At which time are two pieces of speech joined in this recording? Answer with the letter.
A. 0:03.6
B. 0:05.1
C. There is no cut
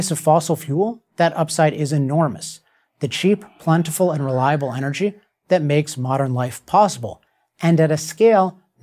A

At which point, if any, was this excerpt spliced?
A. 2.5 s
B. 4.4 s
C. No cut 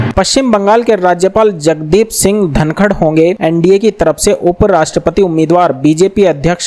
C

